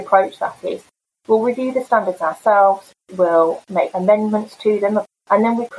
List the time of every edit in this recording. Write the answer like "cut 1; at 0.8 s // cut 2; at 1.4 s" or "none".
cut 1; at 3.9 s